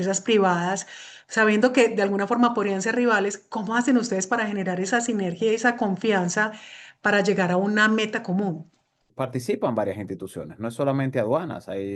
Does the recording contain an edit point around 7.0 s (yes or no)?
no